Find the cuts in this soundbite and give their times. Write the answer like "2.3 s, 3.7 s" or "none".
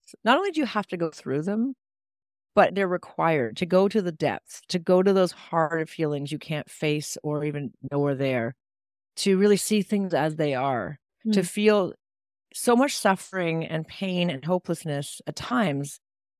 2.7 s